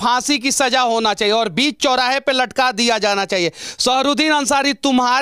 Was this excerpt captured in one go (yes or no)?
yes